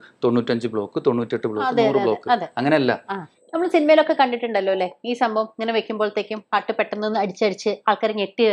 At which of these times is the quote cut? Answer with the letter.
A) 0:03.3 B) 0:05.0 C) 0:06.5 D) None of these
A